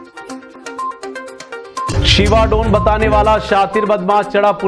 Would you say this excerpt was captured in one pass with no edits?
no; 1 cut; at 1.5 s

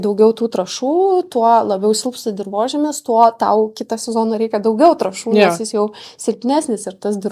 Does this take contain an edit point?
no; 0 cuts

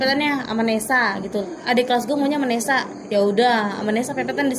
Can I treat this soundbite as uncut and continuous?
no; 1 cut; at 1.5 s

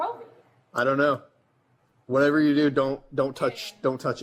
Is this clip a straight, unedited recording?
yes; 0 cuts

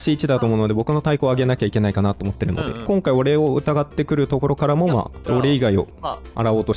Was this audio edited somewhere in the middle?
yes; 2 cuts; at 2.9 s, 5.2 s

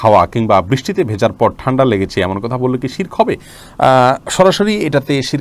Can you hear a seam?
no; 0 cuts

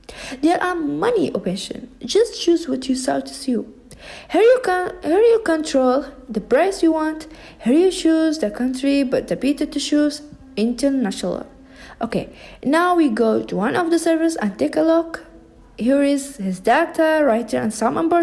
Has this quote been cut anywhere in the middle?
no; 0 cuts

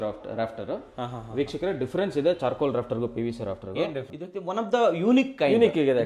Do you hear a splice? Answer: yes; 1 cut; at 4.2 s

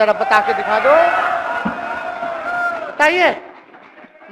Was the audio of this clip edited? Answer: no; 0 cuts

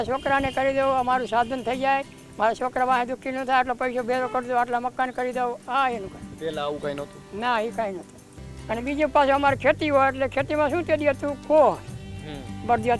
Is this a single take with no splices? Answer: yes; 0 cuts

